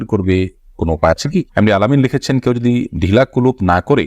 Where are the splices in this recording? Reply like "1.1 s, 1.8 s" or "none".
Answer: 1.5 s